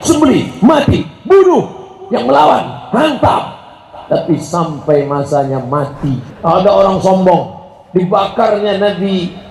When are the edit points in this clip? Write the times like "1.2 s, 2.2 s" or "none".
6.2 s

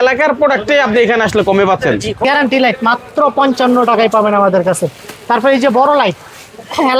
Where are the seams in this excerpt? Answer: 2.2 s

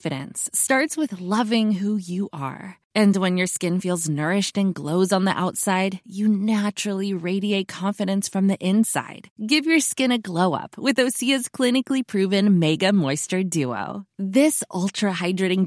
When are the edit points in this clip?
none

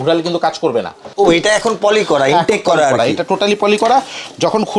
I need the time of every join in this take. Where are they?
1.0 s

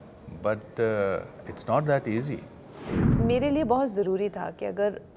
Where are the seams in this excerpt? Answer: 3.0 s

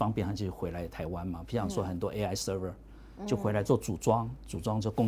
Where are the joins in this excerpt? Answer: none

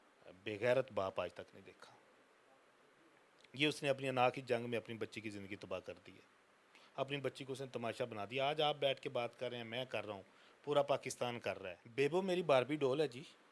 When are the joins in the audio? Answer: 11.8 s

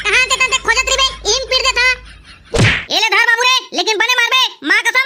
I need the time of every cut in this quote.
none

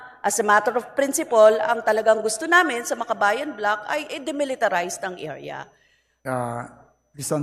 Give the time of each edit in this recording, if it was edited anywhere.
6.1 s

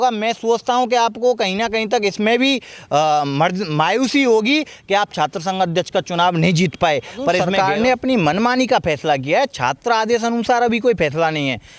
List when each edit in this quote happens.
7.5 s

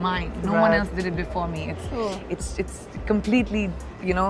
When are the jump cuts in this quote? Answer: none

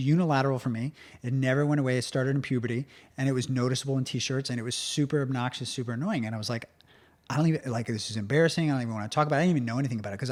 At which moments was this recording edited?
none

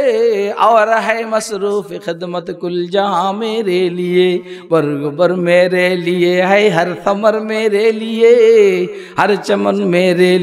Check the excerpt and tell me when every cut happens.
none

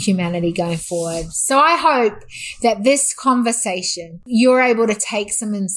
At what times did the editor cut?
4.2 s

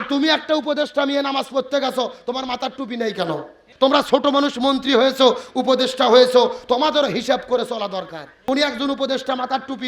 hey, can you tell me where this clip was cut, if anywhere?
3.6 s, 8.3 s

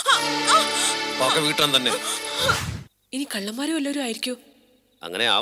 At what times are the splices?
2.7 s

